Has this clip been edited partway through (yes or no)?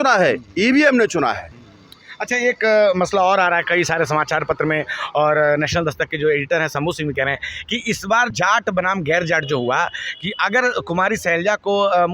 no